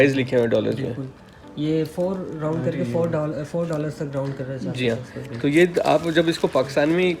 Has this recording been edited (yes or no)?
no